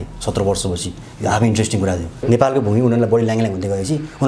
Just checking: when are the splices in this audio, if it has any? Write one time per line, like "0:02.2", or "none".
0:02.2